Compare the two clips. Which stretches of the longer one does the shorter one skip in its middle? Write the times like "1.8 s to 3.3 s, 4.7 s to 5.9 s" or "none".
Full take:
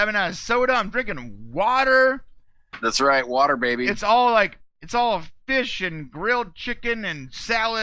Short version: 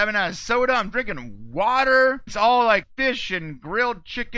2.3 s to 4.0 s, 4.6 s to 5.4 s